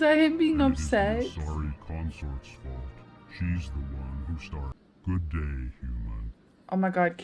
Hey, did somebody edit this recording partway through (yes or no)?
yes